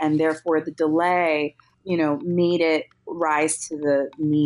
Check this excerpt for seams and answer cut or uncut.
cut